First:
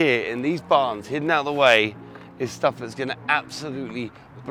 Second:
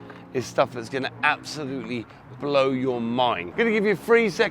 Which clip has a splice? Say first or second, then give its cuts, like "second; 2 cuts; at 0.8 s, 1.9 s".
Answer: second; 1 cut; at 3.4 s